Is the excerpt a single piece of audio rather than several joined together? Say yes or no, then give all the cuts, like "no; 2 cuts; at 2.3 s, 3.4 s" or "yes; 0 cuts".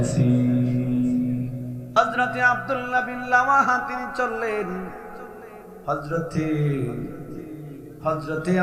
no; 1 cut; at 2.0 s